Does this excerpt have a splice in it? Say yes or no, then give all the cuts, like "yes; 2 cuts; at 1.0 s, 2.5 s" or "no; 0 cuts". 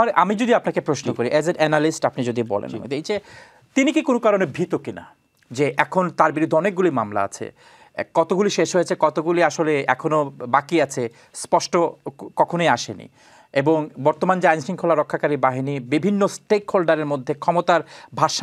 no; 0 cuts